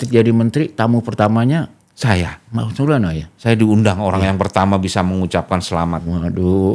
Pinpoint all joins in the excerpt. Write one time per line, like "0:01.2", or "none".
none